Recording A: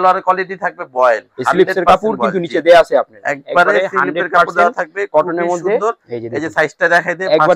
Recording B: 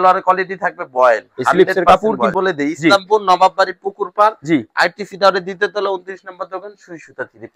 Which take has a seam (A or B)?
B